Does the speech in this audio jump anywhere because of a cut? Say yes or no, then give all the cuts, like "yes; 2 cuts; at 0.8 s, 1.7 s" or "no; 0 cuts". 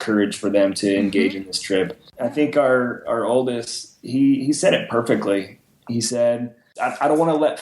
yes; 2 cuts; at 2.0 s, 6.6 s